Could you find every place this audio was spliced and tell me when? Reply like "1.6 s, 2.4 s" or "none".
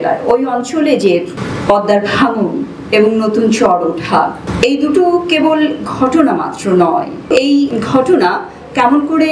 1.4 s, 4.4 s, 7.5 s